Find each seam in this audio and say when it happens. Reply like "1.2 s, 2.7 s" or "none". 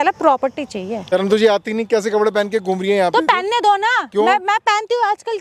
1.1 s